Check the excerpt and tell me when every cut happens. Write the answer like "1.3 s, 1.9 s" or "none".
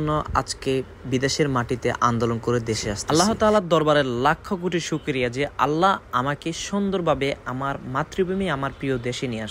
2.9 s

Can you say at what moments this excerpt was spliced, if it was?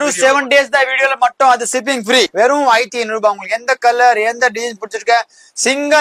2.3 s

